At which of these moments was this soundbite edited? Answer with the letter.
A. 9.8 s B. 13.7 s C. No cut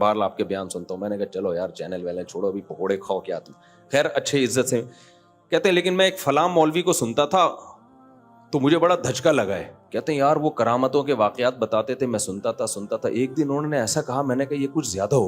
A